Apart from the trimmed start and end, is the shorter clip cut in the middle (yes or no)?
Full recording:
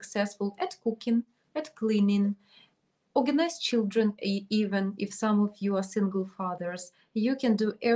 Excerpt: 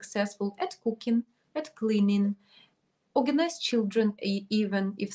no